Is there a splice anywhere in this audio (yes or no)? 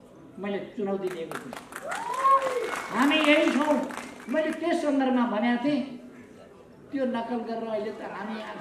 no